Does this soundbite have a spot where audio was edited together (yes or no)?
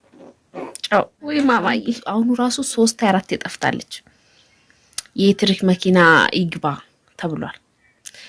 yes